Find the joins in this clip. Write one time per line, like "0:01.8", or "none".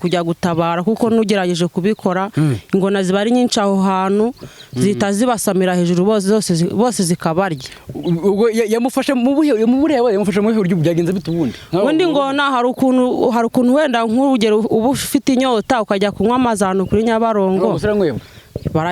none